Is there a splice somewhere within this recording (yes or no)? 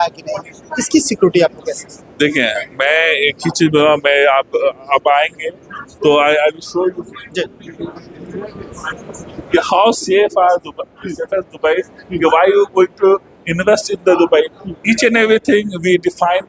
no